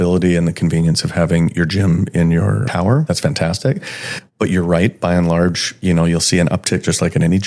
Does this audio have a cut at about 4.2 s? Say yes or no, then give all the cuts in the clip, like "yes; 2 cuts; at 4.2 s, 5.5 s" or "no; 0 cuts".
no; 0 cuts